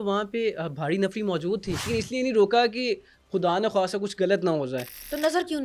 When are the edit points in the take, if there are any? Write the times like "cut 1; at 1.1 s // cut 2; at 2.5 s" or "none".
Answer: cut 1; at 1.9 s